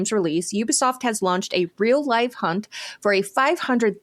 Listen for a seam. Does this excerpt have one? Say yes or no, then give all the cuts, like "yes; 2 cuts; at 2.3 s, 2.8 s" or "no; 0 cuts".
no; 0 cuts